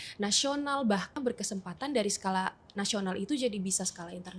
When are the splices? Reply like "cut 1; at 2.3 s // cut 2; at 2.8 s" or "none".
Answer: cut 1; at 1.1 s

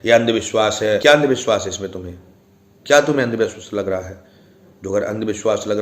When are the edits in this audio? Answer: cut 1; at 1.0 s

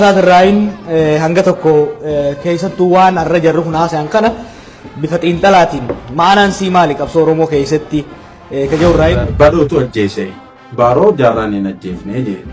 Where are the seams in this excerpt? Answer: cut 1; at 9.2 s

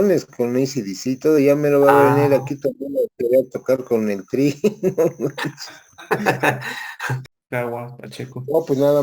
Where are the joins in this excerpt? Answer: cut 1; at 7.3 s

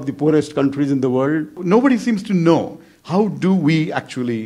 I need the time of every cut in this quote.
cut 1; at 1.6 s

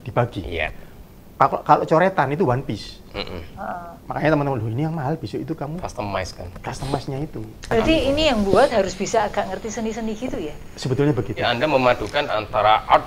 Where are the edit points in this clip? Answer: cut 1; at 7.7 s // cut 2; at 11.4 s

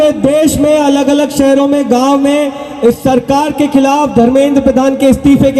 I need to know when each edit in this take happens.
none

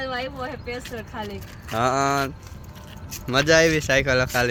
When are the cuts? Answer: none

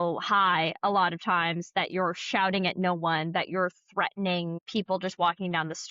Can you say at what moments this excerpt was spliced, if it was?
cut 1; at 4.6 s

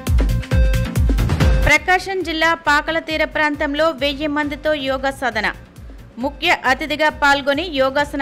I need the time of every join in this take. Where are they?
cut 1; at 1.5 s

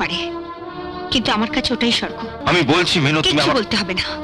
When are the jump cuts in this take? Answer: cut 1; at 2.4 s

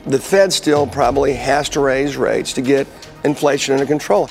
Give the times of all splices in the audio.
none

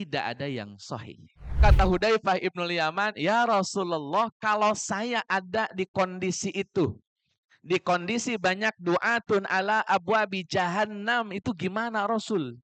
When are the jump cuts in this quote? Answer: cut 1; at 1.6 s

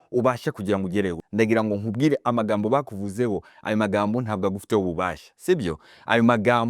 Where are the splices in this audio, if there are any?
cut 1; at 1.2 s

